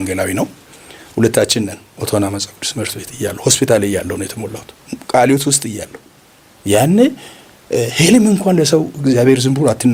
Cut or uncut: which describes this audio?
uncut